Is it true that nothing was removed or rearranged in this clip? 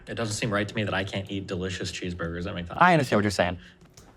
yes; 0 cuts

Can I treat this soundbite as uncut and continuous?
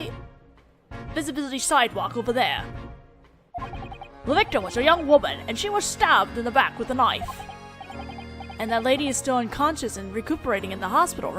no; 1 cut; at 5.1 s

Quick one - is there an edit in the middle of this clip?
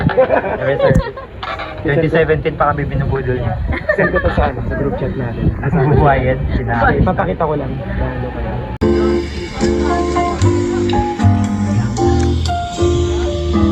no; 0 cuts

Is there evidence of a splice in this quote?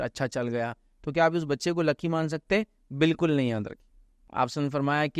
yes; 1 cut; at 4.2 s

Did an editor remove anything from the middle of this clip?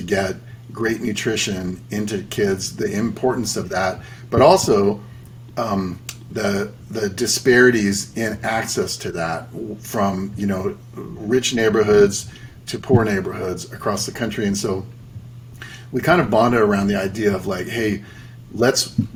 no; 0 cuts

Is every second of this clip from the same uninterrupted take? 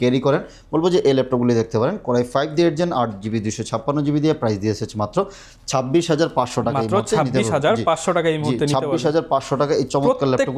yes; 0 cuts

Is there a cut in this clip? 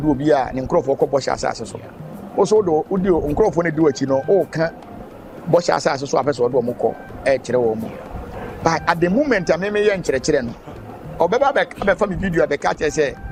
no; 0 cuts

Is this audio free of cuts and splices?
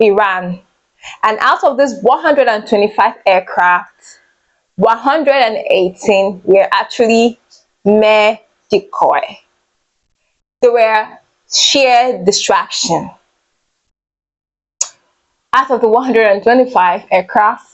yes; 0 cuts

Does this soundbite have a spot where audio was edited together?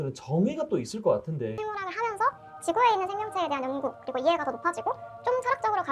yes; 1 cut; at 1.6 s

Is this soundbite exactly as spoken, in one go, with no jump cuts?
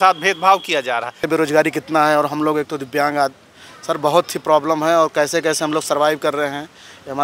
no; 1 cut; at 1.2 s

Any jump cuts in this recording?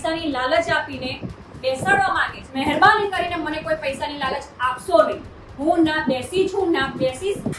yes; 1 cut; at 2.4 s

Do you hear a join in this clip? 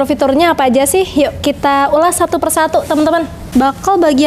yes; 1 cut; at 3.4 s

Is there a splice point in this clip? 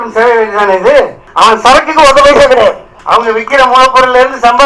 yes; 2 cuts; at 1.2 s, 2.9 s

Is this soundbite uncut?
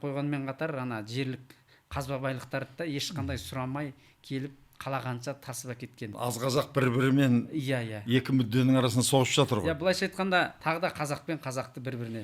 no; 2 cuts; at 6.1 s, 10.6 s

